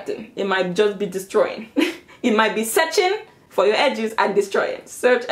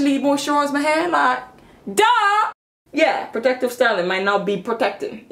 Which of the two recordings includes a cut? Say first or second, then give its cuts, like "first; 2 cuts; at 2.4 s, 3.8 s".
second; 1 cut; at 2.5 s